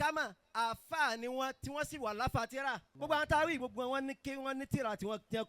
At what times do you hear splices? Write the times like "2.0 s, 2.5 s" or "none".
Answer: 2.9 s